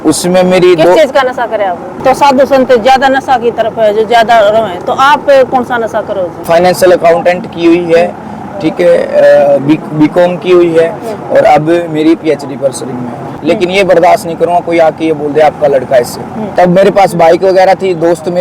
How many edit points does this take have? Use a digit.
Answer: 4